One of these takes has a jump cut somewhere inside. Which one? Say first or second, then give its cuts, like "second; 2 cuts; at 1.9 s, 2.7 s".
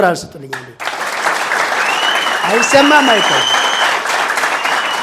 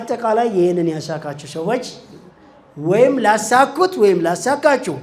first; 1 cut; at 1.2 s